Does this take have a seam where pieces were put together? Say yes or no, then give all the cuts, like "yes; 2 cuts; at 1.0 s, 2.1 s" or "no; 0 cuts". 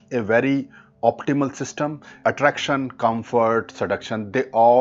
yes; 1 cut; at 2.2 s